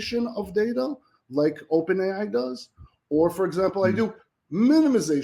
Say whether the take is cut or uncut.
uncut